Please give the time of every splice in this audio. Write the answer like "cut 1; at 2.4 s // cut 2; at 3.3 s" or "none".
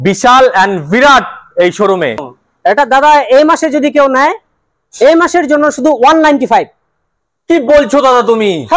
cut 1; at 2.2 s